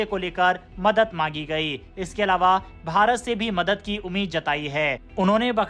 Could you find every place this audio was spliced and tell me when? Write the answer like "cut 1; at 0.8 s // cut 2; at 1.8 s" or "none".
none